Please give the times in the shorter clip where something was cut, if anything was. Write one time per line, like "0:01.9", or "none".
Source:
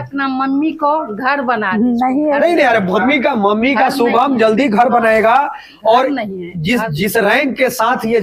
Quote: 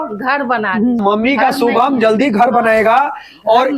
0:01.0